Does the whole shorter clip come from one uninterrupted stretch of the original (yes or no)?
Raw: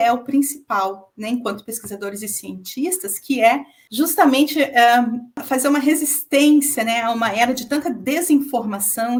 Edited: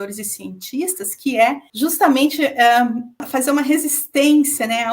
no